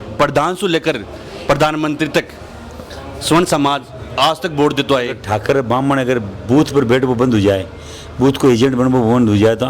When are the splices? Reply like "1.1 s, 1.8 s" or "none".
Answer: 5.2 s